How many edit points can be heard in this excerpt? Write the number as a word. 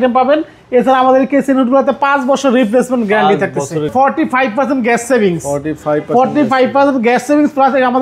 one